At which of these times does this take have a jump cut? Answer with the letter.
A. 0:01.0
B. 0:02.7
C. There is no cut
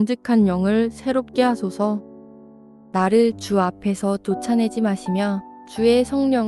B